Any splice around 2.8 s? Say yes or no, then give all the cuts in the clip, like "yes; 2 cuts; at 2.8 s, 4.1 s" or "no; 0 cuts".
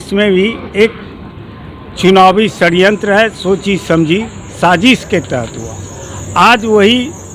no; 0 cuts